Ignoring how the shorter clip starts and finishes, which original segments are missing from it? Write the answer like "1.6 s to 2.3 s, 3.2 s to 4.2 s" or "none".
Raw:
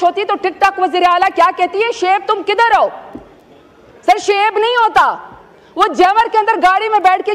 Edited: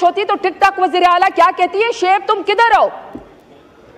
none

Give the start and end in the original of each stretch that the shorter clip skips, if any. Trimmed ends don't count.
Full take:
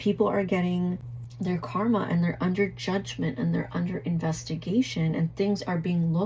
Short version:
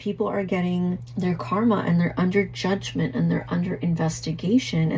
1.1 s to 1.3 s

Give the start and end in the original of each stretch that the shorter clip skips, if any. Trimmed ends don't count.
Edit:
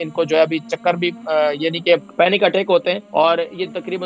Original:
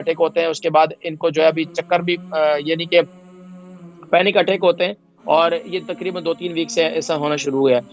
3.1 s to 4.0 s, 5.0 s to 5.2 s

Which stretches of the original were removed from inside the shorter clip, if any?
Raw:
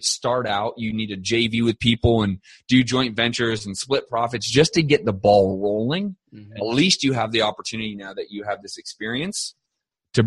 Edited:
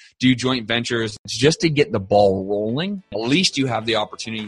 3.8 s to 4.4 s, 6.2 s to 6.5 s

